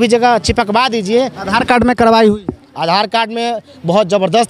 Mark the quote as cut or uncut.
cut